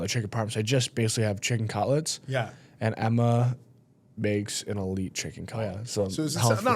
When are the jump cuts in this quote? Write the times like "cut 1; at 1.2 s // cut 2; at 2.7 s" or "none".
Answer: cut 1; at 5.7 s